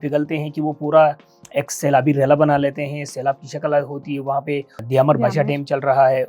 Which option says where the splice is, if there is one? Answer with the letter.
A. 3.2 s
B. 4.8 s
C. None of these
B